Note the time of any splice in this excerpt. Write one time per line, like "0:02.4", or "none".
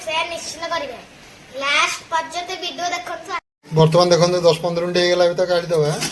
none